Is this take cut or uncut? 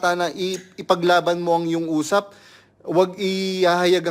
uncut